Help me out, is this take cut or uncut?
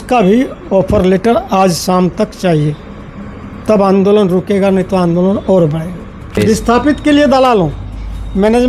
cut